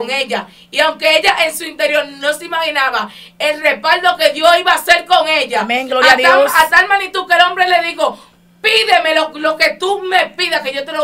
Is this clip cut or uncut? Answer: uncut